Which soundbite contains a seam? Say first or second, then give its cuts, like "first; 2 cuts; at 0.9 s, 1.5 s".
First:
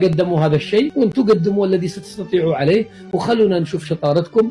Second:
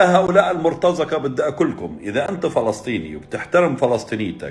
first; 1 cut; at 0.9 s